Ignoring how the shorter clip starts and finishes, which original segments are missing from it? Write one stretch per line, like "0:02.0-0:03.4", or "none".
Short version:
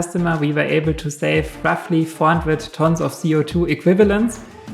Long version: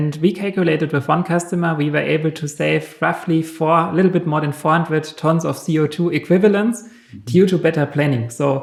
0:03.5-0:04.6